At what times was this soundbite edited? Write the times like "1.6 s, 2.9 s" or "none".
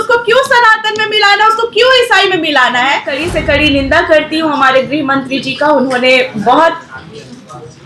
3.2 s